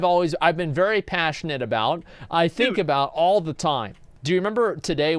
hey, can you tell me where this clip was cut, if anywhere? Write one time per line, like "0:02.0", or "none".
0:04.1